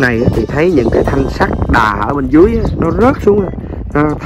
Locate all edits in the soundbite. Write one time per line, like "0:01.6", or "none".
none

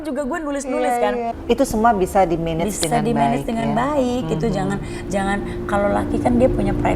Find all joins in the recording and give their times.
0:01.3

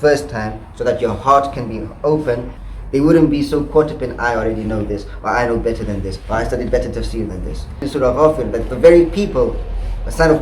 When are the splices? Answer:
0:02.5
0:07.8

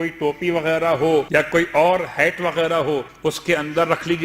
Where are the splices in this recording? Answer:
0:01.3
0:03.1

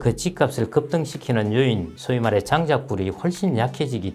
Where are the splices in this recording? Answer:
none

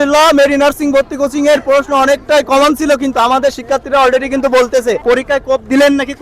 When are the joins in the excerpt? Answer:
0:05.0

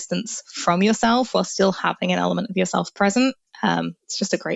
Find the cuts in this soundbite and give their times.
none

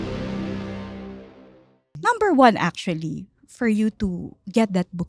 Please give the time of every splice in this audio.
0:01.9

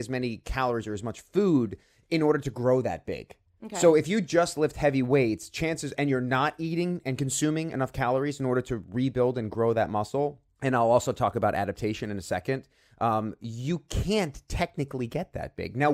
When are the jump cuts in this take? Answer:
none

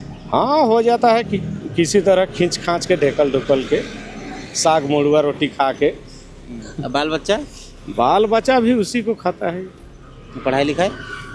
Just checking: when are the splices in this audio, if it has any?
none

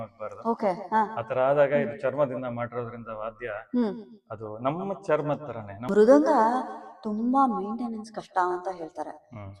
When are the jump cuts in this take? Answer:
0:05.7

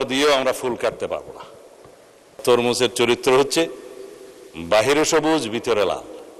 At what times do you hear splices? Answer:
0:02.4

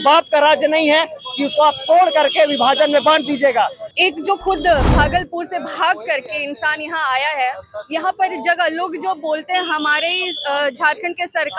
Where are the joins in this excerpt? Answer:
0:03.8

